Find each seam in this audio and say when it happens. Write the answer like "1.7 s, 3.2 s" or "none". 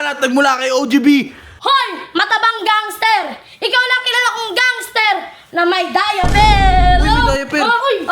1.4 s

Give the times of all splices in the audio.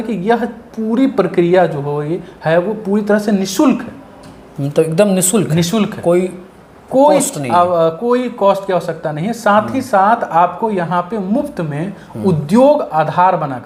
none

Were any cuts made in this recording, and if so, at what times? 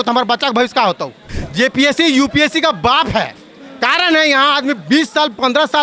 1.4 s

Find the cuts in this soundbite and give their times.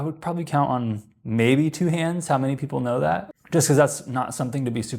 3.3 s

